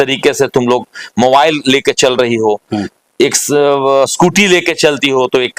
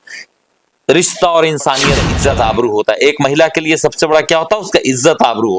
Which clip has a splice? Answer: second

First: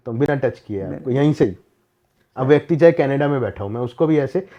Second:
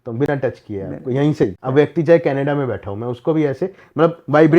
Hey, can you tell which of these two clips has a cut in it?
second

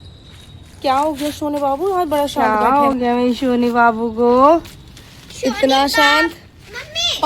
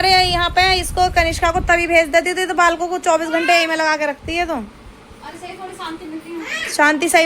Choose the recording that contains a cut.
first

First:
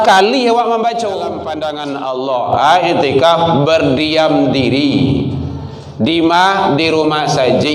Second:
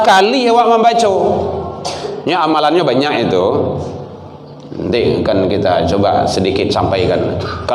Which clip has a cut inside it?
first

